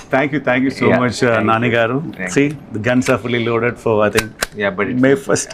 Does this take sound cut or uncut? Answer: uncut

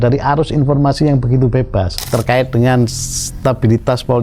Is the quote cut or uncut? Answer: cut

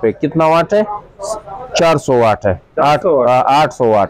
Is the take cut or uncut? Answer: uncut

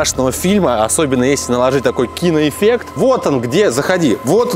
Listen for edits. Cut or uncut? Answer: cut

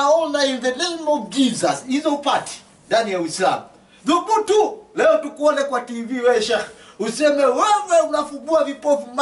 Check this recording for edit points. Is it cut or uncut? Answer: uncut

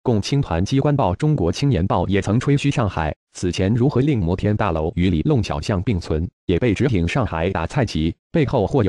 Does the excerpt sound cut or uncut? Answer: uncut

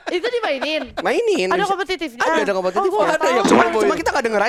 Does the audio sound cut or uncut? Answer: uncut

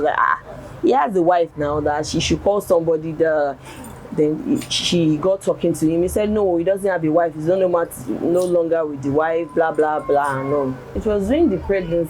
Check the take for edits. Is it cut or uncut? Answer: cut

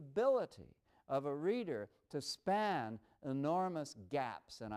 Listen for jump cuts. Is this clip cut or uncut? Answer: uncut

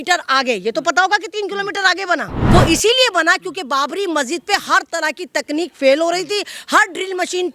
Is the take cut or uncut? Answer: cut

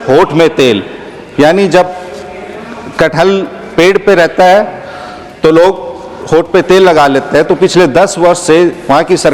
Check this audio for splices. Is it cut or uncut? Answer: uncut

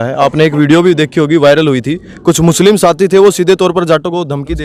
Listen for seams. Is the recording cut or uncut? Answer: uncut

